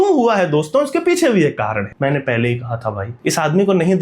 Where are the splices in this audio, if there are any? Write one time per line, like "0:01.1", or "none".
0:01.9
0:03.1